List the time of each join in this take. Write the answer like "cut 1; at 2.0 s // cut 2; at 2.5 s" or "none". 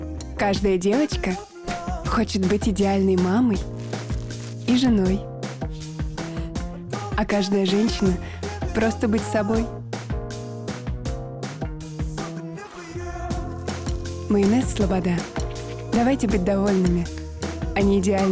none